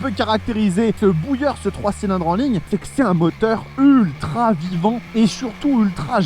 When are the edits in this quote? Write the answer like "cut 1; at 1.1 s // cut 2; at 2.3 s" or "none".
cut 1; at 1.0 s // cut 2; at 2.6 s // cut 3; at 5.0 s